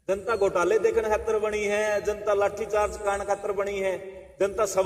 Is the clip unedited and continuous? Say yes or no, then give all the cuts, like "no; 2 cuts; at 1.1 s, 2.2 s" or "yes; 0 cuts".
yes; 0 cuts